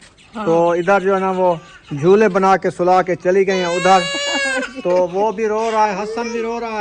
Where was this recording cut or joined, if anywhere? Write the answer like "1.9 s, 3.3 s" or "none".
none